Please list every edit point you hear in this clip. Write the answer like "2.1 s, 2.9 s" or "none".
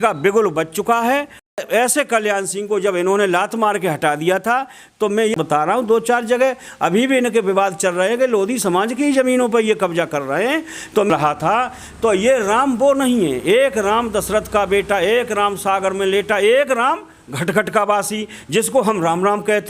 1.6 s, 5.3 s, 11.1 s